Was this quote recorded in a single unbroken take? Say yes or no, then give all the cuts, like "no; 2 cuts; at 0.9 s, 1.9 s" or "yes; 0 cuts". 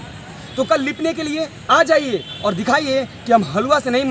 yes; 0 cuts